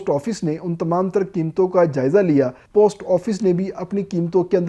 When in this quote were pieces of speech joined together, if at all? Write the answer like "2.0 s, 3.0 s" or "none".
2.6 s